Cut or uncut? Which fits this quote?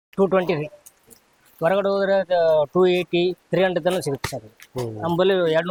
uncut